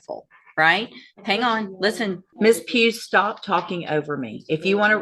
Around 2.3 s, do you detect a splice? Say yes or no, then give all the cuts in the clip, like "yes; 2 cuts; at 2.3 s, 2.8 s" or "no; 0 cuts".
yes; 1 cut; at 2.3 s